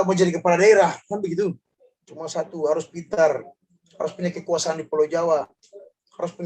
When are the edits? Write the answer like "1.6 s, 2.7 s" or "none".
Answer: 1.7 s